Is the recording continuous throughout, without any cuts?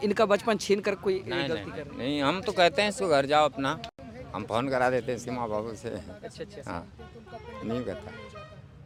yes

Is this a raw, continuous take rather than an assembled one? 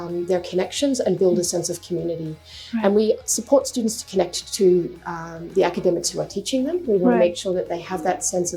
yes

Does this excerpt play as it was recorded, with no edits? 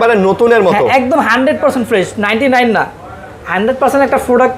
yes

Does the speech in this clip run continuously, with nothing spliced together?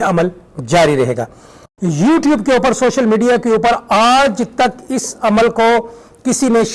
no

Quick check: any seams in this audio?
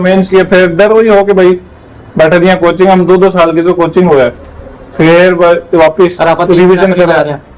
no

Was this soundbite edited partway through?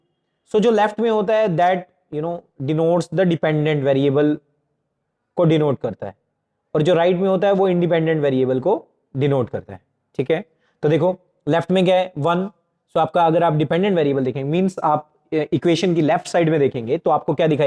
no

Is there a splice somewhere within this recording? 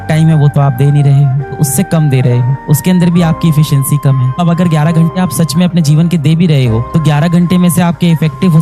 yes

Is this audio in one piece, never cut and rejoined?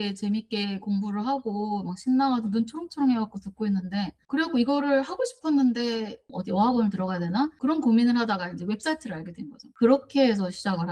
yes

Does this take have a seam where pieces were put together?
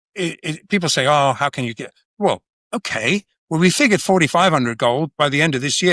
yes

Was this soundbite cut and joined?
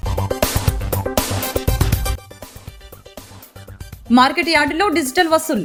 no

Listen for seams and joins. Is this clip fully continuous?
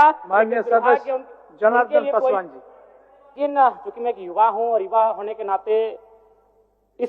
no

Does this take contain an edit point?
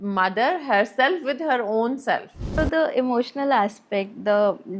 yes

